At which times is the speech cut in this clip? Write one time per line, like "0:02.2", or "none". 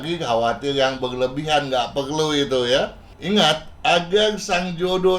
0:03.1